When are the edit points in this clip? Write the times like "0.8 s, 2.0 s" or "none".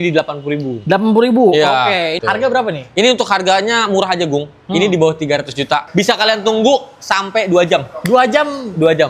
2.2 s, 5.9 s